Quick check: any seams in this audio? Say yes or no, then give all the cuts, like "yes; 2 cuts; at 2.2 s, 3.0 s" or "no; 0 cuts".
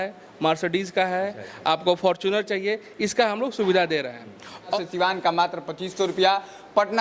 yes; 1 cut; at 4.7 s